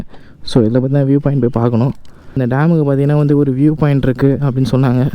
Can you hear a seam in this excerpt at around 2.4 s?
yes; 1 cut; at 2.4 s

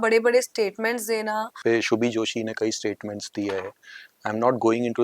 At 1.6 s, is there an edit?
yes; 1 cut; at 1.6 s

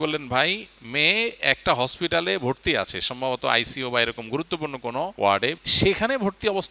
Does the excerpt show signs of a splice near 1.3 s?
no; 1 cut; at 5.6 s

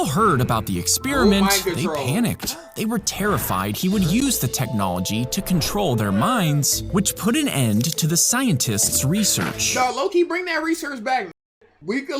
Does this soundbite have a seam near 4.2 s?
yes; 1 cut; at 4.2 s

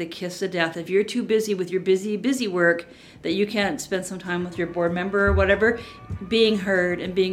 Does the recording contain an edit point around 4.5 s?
yes; 3 cuts; at 0.8 s, 4.5 s, 5.9 s

